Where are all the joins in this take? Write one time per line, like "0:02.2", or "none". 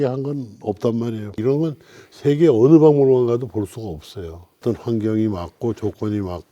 0:01.3
0:04.6